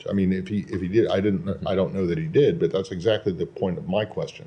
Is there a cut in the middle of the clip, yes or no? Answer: no